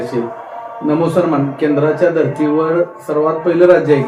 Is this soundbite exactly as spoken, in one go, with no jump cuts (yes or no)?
yes